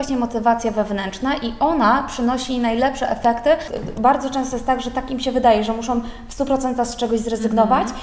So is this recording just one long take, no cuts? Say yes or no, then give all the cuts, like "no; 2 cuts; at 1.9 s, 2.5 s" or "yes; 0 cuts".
no; 1 cut; at 3.8 s